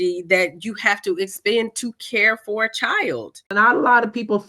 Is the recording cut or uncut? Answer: cut